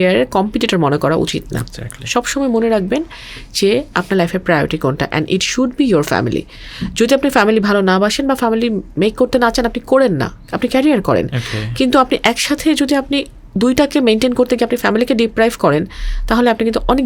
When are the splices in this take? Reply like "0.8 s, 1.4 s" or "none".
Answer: none